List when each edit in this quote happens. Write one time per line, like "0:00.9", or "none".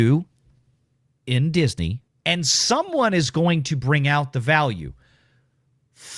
0:02.1

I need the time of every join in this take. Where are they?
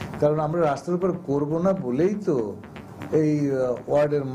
none

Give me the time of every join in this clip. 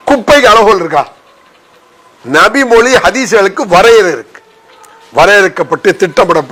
none

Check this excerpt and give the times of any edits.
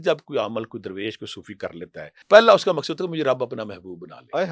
0:02.2

